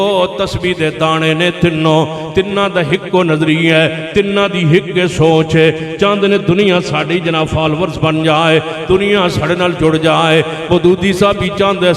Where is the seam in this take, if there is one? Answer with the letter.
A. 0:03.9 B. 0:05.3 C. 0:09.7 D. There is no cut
D